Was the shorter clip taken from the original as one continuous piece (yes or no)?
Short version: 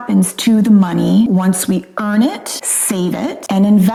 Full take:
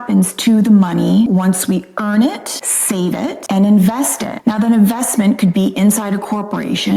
yes